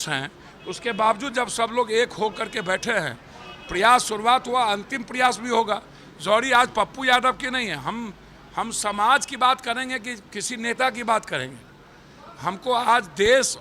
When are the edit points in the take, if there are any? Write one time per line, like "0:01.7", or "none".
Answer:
none